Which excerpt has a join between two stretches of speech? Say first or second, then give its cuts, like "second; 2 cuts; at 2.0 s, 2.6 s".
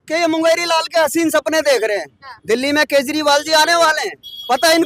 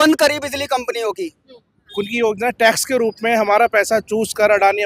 second; 1 cut; at 1.8 s